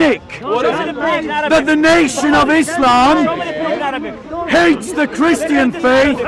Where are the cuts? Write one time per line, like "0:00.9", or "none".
none